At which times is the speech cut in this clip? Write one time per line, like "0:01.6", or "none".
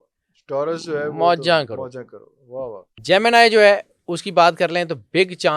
0:02.9